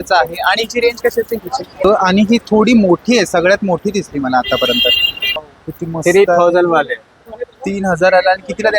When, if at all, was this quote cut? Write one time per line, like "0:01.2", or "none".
0:01.8
0:05.4